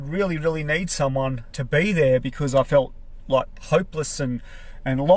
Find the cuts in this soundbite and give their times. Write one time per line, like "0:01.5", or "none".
0:01.5